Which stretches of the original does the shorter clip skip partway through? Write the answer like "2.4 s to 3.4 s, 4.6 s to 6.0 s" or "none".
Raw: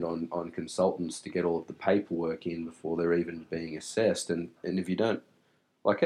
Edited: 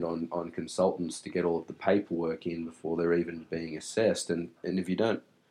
none